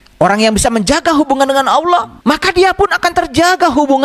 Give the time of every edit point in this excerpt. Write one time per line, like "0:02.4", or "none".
0:02.1